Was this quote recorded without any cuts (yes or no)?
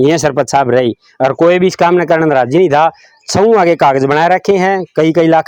yes